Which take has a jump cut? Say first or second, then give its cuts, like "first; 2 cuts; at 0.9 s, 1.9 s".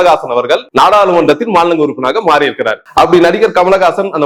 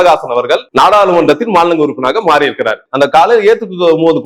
second; 1 cut; at 2.8 s